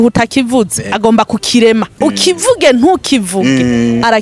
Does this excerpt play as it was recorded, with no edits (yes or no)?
no